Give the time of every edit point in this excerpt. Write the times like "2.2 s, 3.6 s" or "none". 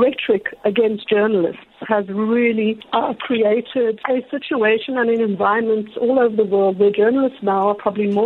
2.8 s, 4.0 s